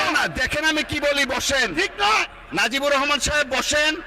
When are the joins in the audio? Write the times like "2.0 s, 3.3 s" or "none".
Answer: none